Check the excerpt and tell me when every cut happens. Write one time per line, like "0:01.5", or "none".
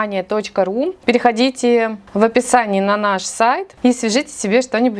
0:01.0
0:02.0
0:03.7